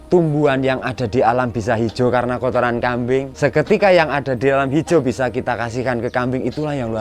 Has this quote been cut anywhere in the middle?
yes; 1 cut; at 3.3 s

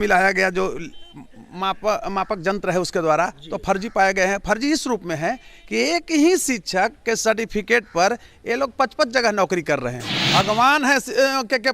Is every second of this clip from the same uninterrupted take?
no; 1 cut; at 10.2 s

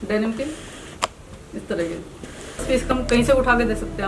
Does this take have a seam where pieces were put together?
yes; 1 cut; at 2.6 s

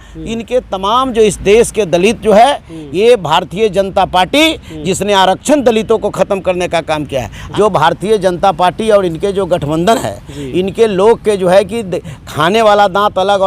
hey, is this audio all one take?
no; 1 cut; at 7.4 s

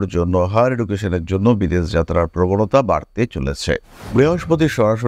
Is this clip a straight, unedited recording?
no; 1 cut; at 3.9 s

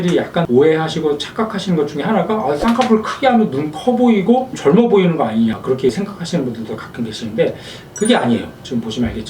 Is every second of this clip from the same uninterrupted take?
yes; 0 cuts

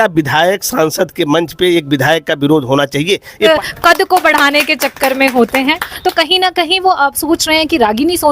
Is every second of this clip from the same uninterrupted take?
no; 1 cut; at 3.5 s

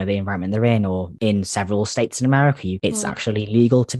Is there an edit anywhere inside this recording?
yes; 2 cuts; at 1.1 s, 2.7 s

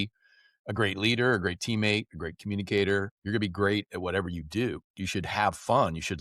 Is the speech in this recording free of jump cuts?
no; 2 cuts; at 3.2 s, 4.9 s

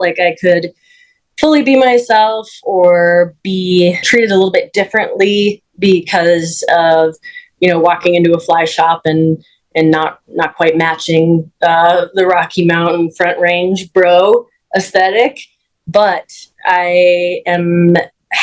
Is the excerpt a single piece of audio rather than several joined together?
yes; 0 cuts

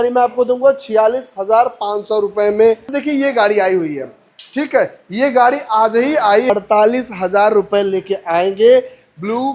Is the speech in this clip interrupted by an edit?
yes; 2 cuts; at 2.9 s, 6.5 s

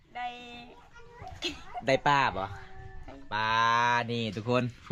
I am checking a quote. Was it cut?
no; 0 cuts

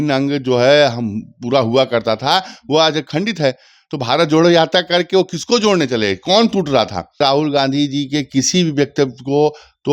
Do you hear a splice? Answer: yes; 1 cut; at 7.2 s

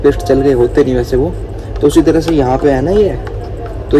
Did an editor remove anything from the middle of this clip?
no; 0 cuts

